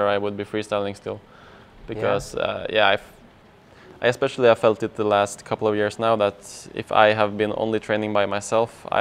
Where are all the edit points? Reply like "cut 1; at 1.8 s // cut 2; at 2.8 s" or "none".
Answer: none